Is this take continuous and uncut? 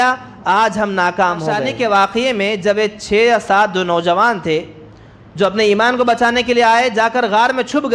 no; 1 cut; at 1.7 s

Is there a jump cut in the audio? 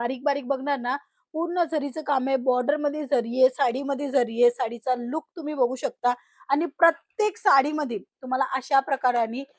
no; 0 cuts

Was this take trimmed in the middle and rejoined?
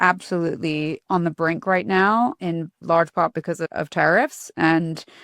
yes; 3 cuts; at 1.0 s, 2.8 s, 3.7 s

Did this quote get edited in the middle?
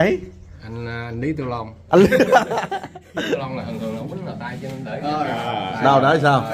yes; 1 cut; at 3.4 s

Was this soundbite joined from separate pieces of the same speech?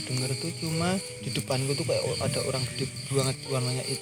yes; 1 cut; at 1.2 s

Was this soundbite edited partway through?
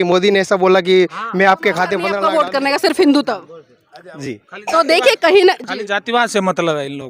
yes; 1 cut; at 2.1 s

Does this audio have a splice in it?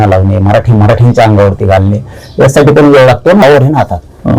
yes; 1 cut; at 3.4 s

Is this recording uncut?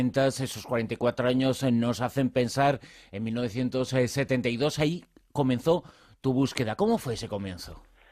no; 1 cut; at 4.1 s

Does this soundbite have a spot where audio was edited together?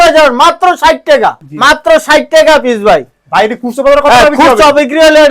yes; 1 cut; at 1.4 s

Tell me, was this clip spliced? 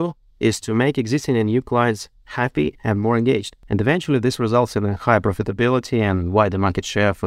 yes; 1 cut; at 3.5 s

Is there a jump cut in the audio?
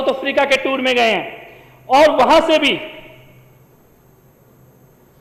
no; 0 cuts

